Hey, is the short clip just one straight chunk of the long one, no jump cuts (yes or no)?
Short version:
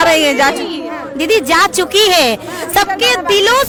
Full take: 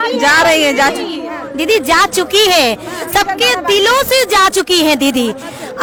yes